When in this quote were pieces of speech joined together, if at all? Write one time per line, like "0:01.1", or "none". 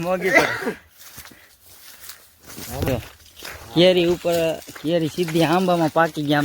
0:02.9